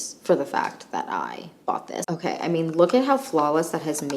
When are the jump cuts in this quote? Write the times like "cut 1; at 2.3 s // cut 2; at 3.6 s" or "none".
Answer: cut 1; at 2.0 s